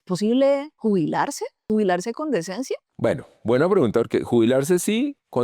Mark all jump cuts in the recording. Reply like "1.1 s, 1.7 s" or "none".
1.1 s